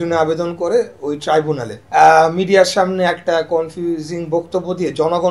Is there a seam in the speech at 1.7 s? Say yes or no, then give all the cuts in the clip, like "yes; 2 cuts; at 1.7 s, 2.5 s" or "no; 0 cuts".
yes; 1 cut; at 1.7 s